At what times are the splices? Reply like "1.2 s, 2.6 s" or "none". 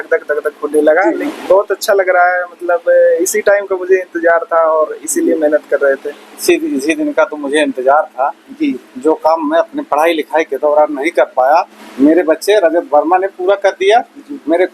1.2 s, 6.4 s, 11.8 s